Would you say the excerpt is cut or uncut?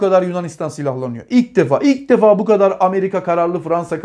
uncut